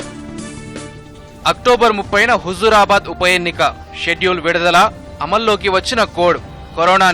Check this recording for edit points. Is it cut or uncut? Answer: cut